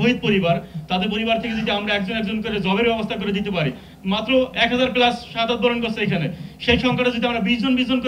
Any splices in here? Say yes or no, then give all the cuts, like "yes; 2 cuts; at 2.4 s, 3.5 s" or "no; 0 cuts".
no; 0 cuts